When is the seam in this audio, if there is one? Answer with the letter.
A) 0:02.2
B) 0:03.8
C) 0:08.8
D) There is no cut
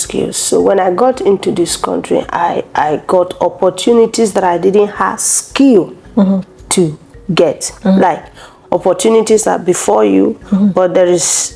D